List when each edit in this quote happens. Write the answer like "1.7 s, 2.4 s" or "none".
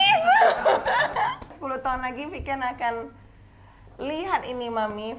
1.6 s